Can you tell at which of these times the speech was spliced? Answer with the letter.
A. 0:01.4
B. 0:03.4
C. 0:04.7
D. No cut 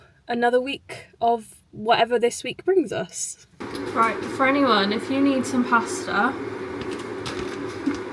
D